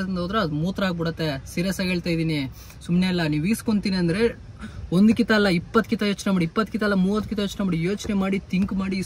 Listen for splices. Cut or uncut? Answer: uncut